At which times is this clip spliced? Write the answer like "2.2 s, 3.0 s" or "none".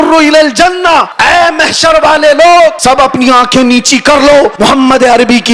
1.1 s, 2.8 s, 4.5 s